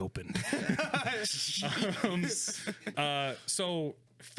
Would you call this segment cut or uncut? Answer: uncut